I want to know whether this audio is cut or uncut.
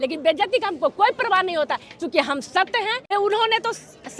cut